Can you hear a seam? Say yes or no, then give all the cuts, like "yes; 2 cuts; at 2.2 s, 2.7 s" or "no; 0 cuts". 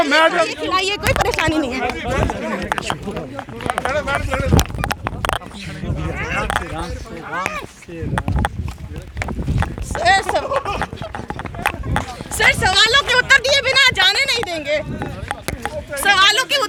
no; 0 cuts